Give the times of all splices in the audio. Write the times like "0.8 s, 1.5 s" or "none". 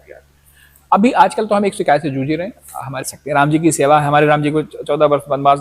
3.0 s